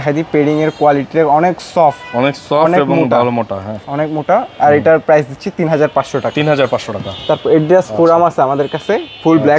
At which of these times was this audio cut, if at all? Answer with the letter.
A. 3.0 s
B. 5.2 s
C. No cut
C